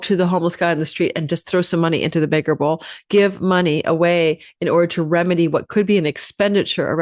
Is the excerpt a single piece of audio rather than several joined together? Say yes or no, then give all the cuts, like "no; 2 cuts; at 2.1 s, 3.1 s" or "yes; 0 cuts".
yes; 0 cuts